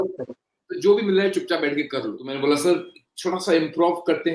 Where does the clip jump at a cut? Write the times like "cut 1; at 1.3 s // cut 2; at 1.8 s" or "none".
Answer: cut 1; at 2.2 s